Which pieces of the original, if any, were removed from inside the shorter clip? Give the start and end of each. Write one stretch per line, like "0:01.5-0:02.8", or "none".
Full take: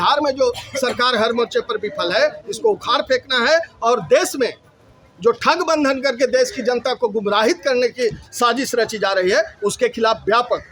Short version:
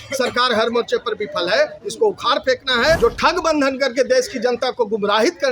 0:03.6-0:05.2